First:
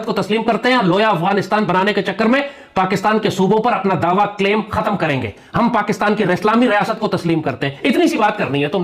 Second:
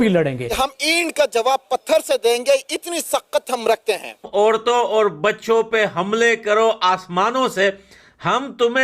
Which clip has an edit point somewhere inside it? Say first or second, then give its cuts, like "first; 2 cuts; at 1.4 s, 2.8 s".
second; 1 cut; at 4.3 s